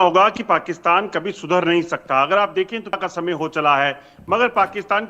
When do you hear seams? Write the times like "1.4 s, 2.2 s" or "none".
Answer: 3.0 s